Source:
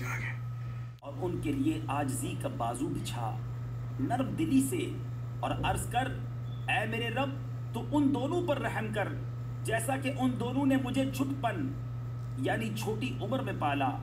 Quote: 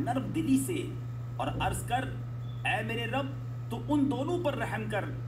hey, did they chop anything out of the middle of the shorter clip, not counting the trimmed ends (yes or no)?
no